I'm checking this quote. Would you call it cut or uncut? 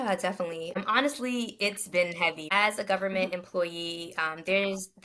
cut